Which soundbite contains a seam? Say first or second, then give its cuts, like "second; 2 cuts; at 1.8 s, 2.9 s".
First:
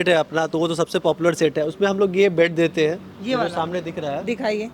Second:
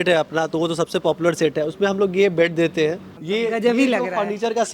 second; 1 cut; at 3.1 s